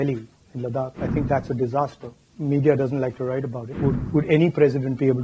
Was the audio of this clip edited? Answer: yes; 2 cuts; at 1.0 s, 3.6 s

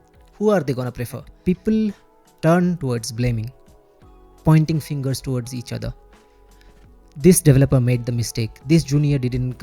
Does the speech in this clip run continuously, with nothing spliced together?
no; 1 cut; at 1.3 s

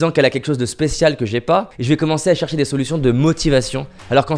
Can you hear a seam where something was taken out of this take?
yes; 1 cut; at 1.7 s

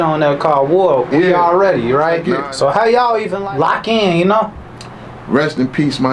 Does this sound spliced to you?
yes; 2 cuts; at 2.3 s, 3.4 s

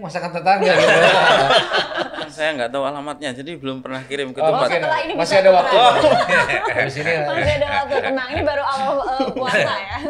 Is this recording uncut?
no; 1 cut; at 2.3 s

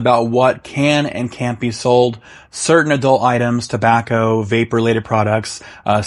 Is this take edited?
no; 0 cuts

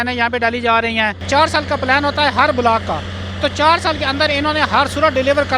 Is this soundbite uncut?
no; 1 cut; at 1.2 s

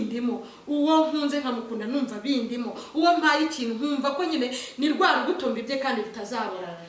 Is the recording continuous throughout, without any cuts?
yes; 0 cuts

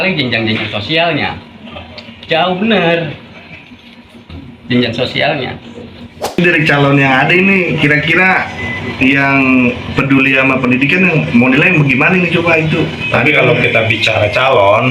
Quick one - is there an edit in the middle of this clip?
yes; 1 cut; at 6.3 s

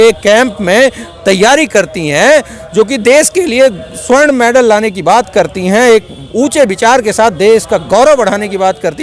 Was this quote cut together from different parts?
no; 0 cuts

